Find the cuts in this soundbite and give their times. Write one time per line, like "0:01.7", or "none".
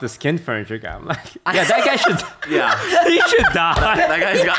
none